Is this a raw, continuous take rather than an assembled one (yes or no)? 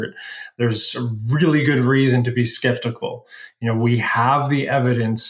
yes